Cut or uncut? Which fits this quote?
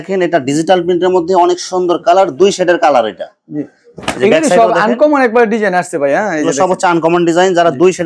uncut